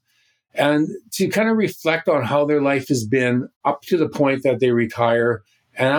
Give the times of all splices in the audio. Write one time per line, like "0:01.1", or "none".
0:03.5